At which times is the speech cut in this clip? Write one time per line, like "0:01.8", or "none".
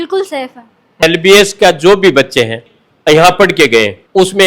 0:01.0
0:02.6